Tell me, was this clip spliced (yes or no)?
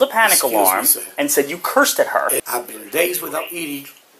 yes